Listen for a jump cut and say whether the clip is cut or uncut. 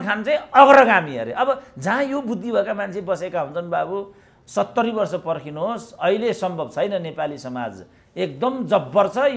uncut